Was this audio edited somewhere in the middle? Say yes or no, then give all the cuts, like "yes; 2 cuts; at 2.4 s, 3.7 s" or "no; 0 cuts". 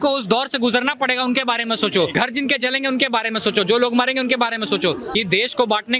yes; 2 cuts; at 2.1 s, 5.0 s